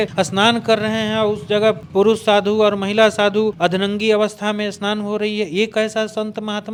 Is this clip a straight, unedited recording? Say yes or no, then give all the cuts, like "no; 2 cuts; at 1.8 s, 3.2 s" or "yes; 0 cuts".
yes; 0 cuts